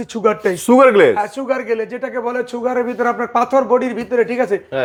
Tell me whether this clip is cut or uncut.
uncut